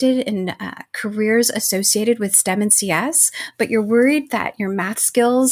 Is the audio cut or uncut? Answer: uncut